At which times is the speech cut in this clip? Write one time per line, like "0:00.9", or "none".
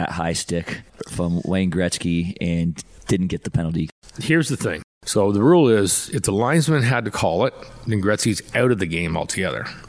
0:01.0
0:02.9
0:03.9
0:04.9